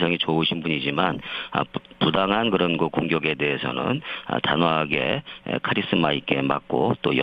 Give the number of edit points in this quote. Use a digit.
1